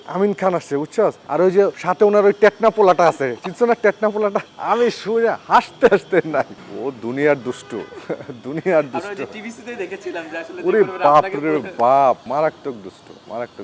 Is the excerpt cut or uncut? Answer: uncut